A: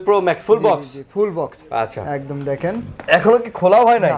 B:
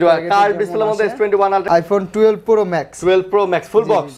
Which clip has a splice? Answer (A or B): B